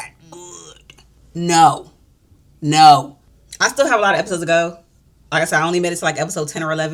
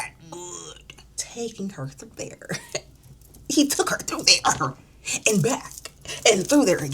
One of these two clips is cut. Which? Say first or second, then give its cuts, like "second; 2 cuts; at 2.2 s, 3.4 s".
second; 1 cut; at 1.2 s